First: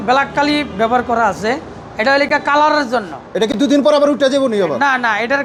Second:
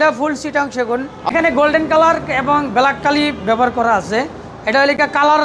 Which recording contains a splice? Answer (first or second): second